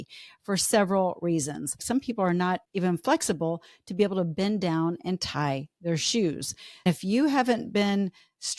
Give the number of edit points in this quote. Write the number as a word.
three